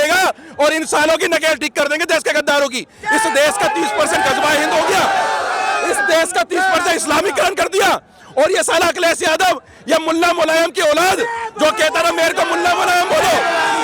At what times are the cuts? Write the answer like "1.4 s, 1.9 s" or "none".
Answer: none